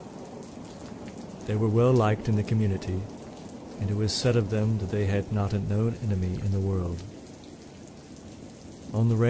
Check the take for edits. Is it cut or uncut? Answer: uncut